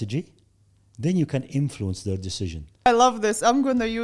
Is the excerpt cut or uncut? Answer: cut